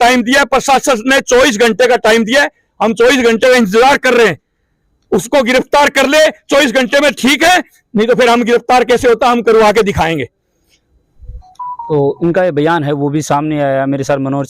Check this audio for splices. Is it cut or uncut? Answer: uncut